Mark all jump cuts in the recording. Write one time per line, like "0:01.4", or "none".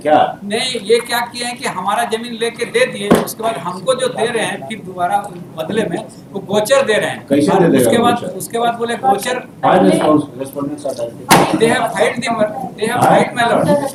none

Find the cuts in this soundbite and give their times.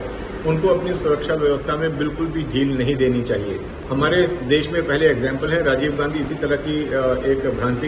0:03.7

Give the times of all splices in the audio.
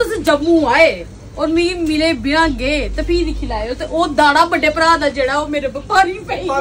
none

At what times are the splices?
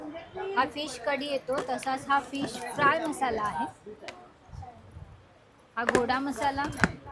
none

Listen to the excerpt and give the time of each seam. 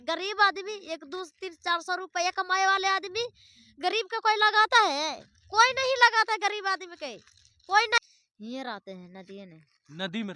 0:08.0

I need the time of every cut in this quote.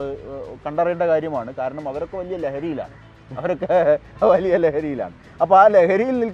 none

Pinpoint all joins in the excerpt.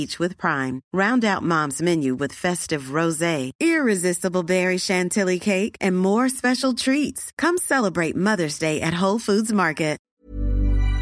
0:10.1

